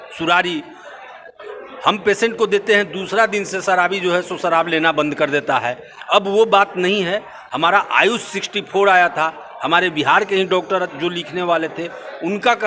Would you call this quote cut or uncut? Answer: uncut